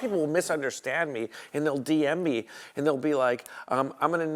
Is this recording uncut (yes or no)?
yes